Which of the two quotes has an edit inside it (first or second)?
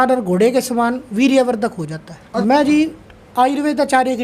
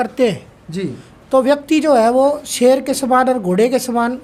first